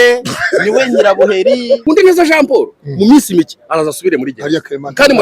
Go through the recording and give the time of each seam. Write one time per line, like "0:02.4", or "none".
0:01.8